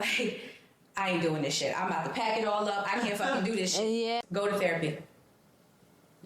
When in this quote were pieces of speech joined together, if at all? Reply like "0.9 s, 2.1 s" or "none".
4.2 s